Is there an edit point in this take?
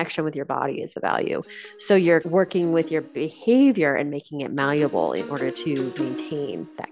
yes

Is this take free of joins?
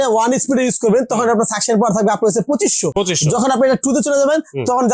yes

